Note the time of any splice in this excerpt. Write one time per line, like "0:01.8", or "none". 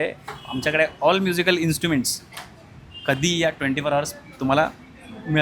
none